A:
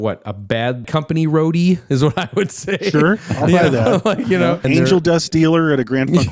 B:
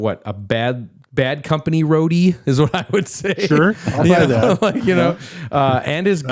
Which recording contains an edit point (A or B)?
A